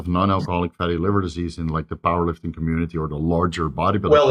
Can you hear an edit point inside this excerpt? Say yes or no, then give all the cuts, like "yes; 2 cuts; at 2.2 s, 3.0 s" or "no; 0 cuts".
no; 0 cuts